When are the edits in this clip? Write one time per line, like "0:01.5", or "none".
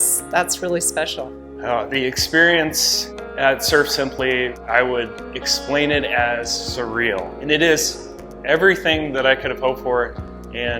0:01.6
0:07.3